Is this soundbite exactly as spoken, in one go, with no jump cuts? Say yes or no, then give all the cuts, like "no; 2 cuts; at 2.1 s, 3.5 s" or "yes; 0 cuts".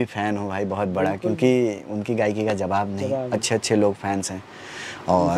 yes; 0 cuts